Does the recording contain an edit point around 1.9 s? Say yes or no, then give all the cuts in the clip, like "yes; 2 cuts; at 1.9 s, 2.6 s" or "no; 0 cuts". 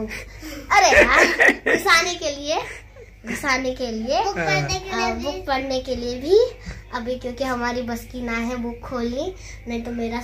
no; 0 cuts